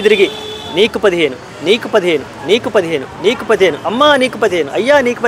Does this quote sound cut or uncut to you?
uncut